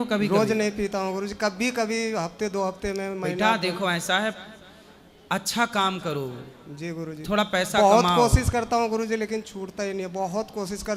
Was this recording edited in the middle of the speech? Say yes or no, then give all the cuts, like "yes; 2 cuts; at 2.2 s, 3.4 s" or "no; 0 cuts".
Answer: no; 0 cuts